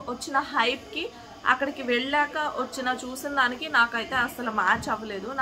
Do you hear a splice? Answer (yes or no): no